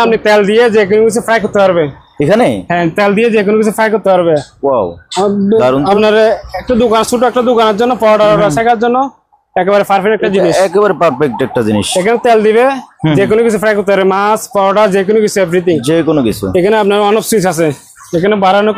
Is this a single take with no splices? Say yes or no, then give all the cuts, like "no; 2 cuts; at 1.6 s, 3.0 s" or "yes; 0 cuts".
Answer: yes; 0 cuts